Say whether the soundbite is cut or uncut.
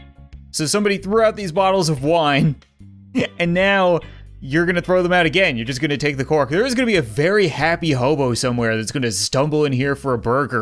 uncut